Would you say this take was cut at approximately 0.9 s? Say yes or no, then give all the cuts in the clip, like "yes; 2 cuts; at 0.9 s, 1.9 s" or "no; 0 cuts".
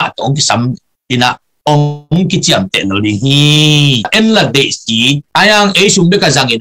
no; 1 cut; at 4.1 s